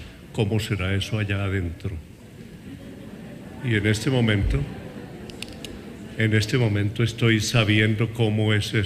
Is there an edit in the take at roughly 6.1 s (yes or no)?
no